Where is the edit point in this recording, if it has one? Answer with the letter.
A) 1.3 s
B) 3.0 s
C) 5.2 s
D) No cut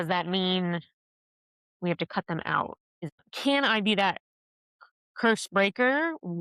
B